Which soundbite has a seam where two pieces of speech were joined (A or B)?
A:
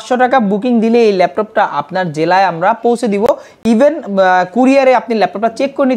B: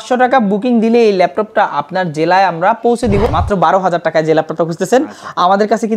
B